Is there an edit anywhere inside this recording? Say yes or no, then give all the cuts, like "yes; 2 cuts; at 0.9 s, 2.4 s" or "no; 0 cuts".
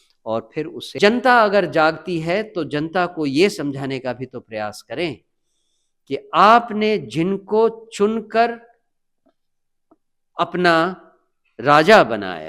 yes; 1 cut; at 1.0 s